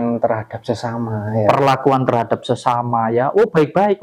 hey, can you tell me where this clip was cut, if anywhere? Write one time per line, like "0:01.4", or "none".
none